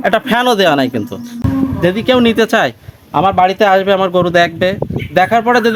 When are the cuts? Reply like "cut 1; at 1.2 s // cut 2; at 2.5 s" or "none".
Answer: cut 1; at 1.4 s